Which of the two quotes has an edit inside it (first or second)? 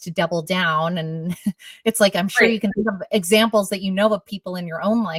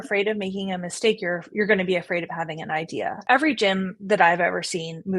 second